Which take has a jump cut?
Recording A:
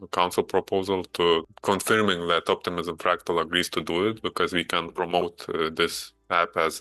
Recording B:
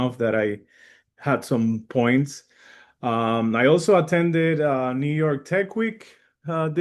A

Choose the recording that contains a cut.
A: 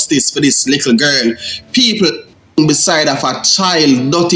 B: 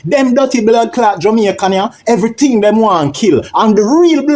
A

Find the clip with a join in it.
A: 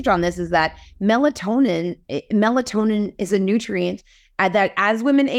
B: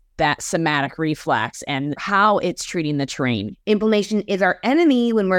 B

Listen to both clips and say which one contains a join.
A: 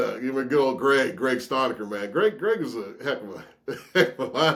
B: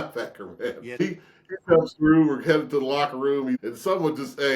B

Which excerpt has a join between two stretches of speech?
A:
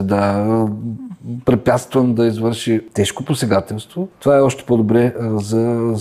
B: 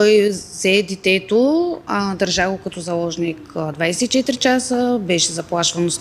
A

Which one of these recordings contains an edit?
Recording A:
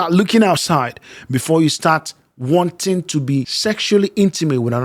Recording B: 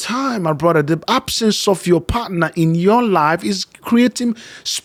A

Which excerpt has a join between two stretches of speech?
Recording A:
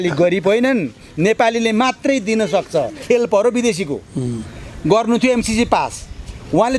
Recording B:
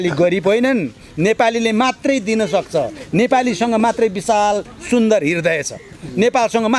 A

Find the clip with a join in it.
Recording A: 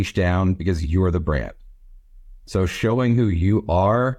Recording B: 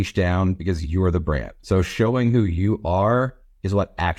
B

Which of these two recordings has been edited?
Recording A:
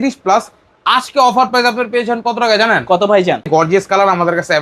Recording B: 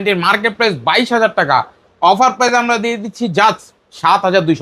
A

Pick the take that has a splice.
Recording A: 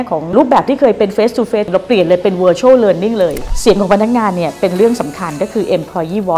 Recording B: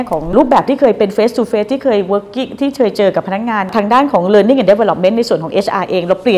A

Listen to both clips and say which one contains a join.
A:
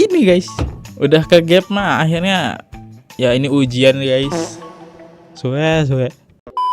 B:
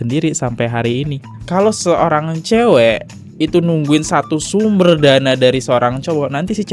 B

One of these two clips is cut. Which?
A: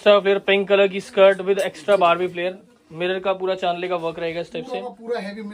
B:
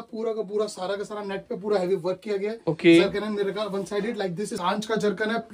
B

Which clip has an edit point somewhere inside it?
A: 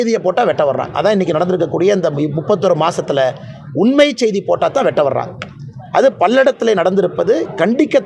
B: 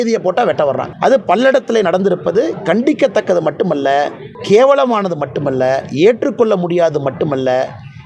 B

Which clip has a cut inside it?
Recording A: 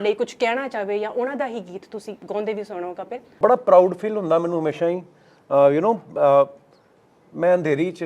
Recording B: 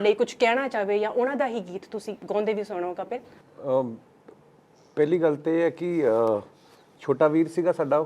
A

